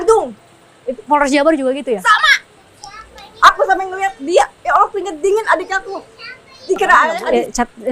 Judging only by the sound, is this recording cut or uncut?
cut